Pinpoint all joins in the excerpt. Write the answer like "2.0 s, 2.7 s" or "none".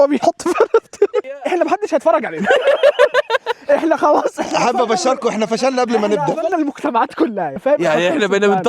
1.3 s, 7.6 s